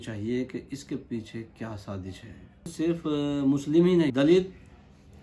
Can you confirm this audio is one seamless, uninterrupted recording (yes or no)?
no